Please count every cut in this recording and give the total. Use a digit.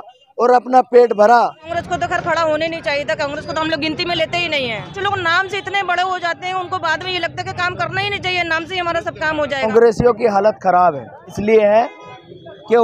4